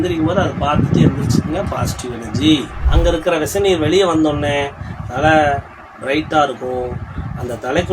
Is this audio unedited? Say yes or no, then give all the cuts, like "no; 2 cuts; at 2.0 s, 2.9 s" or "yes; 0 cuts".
no; 1 cut; at 2.8 s